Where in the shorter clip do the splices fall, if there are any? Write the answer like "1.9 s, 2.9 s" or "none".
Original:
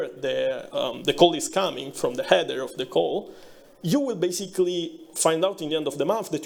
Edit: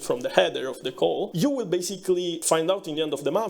1.3 s, 2.4 s

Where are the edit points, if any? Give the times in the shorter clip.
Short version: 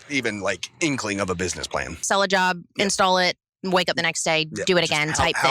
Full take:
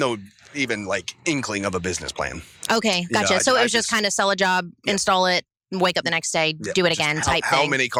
2.0 s

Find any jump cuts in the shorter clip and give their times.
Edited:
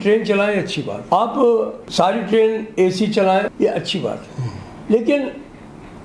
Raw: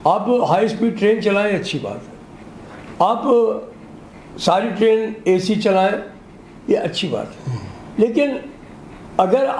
1.0 s, 1.8 s, 3.5 s

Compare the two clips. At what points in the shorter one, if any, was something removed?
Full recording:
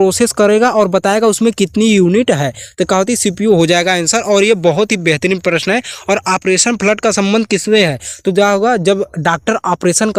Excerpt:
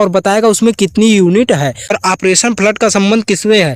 1.9 s

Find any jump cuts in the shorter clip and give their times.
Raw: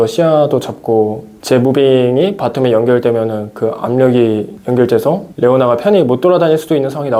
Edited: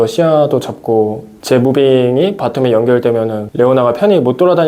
3.5 s

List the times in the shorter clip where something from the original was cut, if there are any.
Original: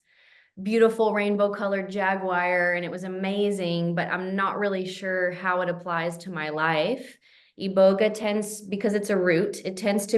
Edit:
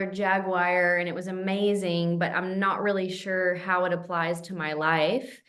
none

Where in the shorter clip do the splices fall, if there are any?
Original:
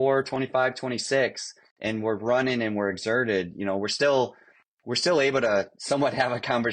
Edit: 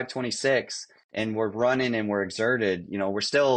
none

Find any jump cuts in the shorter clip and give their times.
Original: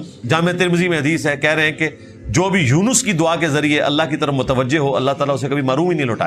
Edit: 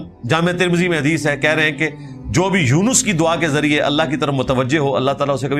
none

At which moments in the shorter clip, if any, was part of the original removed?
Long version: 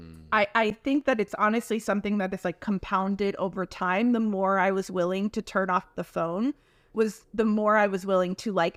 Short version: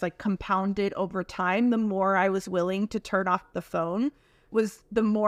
none

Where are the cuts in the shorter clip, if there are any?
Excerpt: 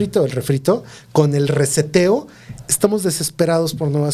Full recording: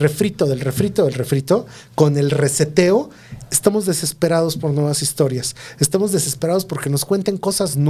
none

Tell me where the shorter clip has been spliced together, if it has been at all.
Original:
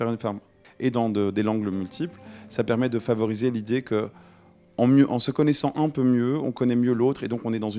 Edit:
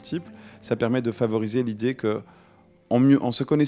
none

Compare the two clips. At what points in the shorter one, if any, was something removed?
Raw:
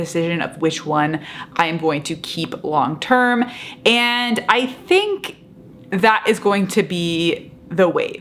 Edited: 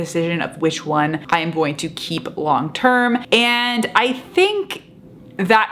1.2 s, 3.2 s

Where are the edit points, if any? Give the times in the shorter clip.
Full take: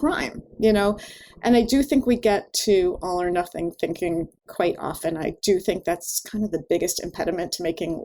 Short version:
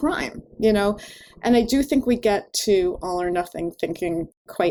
none

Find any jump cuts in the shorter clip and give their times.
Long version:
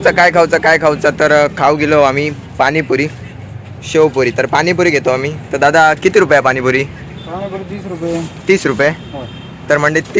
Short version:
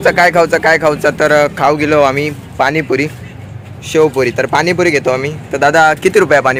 none

